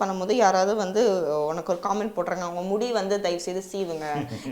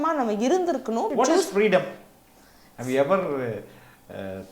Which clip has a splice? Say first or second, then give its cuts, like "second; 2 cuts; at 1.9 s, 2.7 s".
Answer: second; 1 cut; at 1.1 s